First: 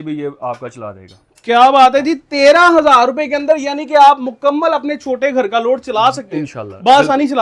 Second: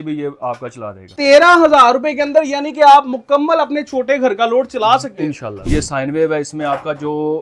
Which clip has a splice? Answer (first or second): second